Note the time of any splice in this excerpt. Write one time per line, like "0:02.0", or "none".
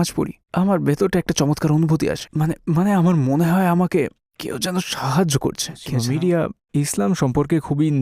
0:05.9